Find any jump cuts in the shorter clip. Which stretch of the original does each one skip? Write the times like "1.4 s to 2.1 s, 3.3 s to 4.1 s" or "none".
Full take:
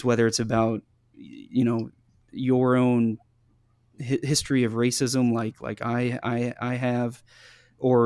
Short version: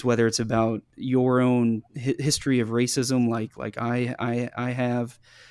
0.9 s to 2.3 s, 3.3 s to 3.9 s